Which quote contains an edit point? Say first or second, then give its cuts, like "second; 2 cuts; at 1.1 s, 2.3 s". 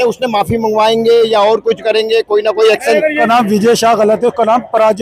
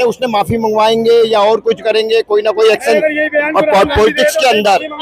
first; 1 cut; at 3.2 s